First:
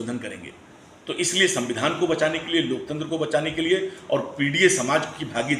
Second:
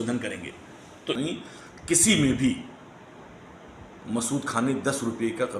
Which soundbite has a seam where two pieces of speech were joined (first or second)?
second